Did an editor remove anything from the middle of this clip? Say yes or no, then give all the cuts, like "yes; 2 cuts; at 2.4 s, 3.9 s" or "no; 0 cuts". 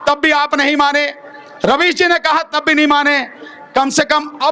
no; 0 cuts